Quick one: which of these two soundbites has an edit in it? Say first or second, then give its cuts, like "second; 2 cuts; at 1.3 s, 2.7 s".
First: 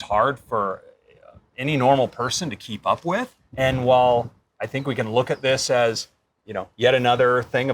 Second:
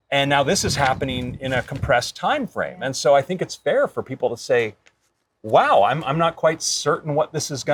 first; 1 cut; at 3.4 s